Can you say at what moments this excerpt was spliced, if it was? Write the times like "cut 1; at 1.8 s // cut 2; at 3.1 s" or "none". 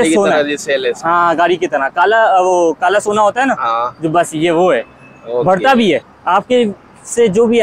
cut 1; at 6.1 s